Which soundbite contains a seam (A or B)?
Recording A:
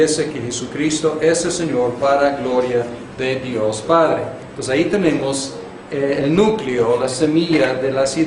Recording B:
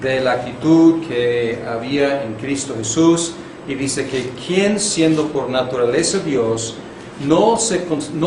B